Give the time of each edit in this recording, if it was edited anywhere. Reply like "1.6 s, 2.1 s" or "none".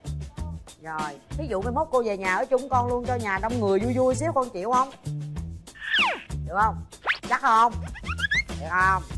none